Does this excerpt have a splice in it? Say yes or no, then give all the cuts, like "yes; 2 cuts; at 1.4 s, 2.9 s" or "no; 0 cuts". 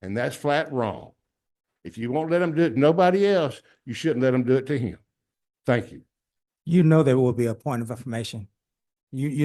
no; 0 cuts